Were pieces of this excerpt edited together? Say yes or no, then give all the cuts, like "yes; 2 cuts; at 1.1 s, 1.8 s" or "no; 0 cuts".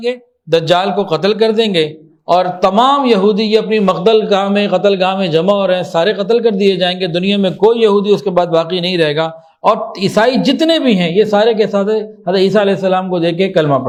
no; 0 cuts